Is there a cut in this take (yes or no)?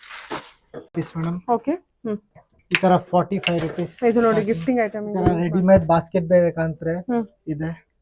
yes